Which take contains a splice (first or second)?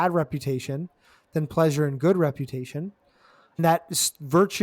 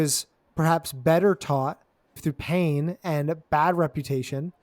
first